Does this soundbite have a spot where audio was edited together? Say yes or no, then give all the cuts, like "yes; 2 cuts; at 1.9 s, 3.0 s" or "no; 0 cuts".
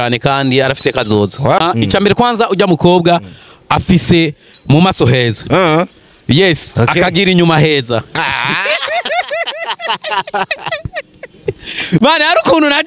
yes; 1 cut; at 1.6 s